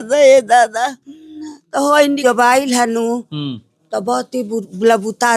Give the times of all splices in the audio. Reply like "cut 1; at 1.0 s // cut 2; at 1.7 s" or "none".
cut 1; at 2.2 s

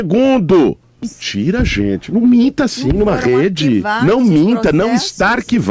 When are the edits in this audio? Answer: cut 1; at 0.9 s

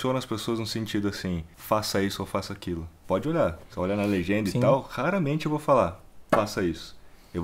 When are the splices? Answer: cut 1; at 1.5 s // cut 2; at 2.9 s // cut 3; at 6.1 s

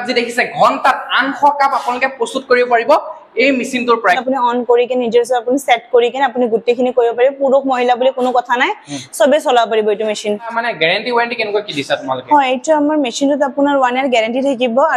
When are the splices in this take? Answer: cut 1; at 4.2 s // cut 2; at 10.5 s

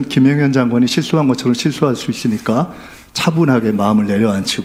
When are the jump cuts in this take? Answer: none

